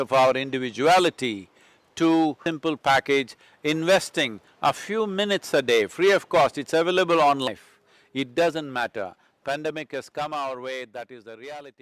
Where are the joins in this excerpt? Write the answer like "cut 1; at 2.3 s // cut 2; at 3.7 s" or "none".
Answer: cut 1; at 2.5 s // cut 2; at 7.5 s